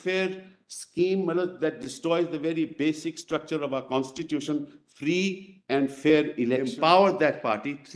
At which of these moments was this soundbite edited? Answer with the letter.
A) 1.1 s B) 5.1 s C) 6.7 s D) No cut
C